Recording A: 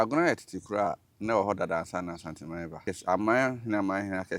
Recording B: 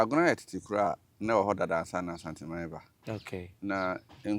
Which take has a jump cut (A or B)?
A